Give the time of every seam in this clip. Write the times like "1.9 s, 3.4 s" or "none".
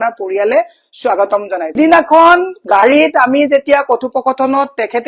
1.7 s